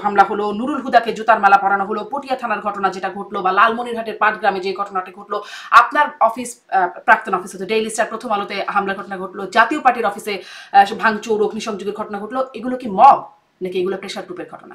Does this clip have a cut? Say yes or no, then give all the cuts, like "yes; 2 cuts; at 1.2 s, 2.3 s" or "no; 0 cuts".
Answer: no; 0 cuts